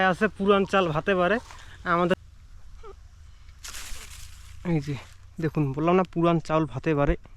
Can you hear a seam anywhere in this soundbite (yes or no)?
yes